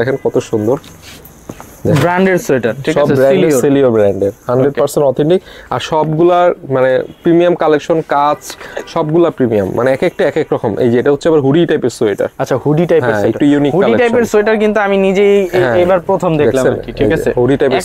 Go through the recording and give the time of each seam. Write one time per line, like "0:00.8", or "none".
none

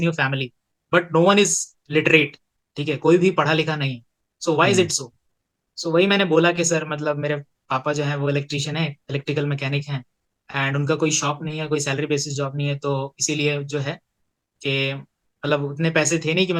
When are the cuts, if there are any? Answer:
none

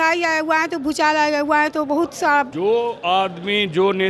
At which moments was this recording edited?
0:02.5

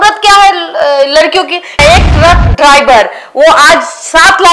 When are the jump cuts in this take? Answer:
0:01.8

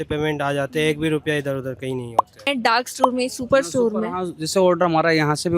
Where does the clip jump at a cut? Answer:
0:02.5

